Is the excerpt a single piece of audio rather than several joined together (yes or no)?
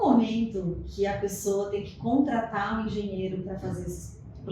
yes